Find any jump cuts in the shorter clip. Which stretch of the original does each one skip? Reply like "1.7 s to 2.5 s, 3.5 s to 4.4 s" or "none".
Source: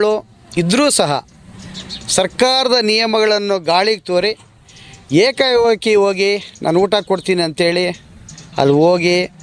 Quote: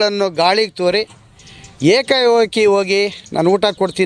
none